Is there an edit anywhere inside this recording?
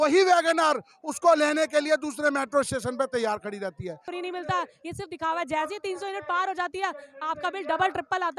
yes; 1 cut; at 4.0 s

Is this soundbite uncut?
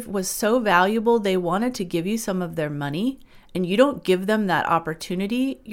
yes; 0 cuts

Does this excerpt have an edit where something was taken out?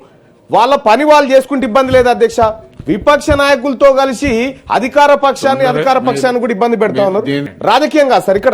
yes; 1 cut; at 7.5 s

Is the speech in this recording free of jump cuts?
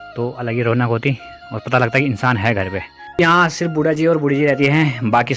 no; 1 cut; at 3.0 s

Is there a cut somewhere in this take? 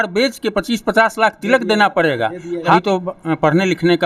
yes; 1 cut; at 2.8 s

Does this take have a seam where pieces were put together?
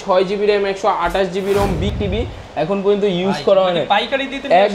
yes; 1 cut; at 1.9 s

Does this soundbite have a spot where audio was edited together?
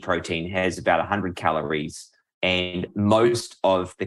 yes; 1 cut; at 2.9 s

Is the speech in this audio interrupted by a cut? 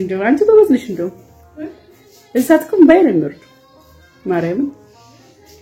no; 0 cuts

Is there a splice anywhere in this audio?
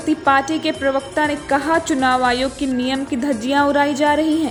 no; 0 cuts

